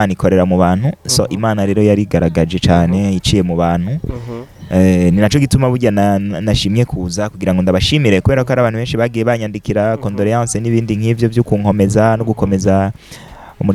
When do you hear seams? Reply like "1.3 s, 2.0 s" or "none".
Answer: none